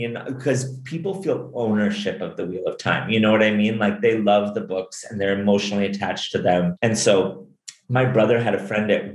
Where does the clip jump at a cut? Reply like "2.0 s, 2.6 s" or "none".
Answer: 6.8 s